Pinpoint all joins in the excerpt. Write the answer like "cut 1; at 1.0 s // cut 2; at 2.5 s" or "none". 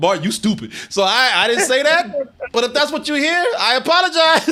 none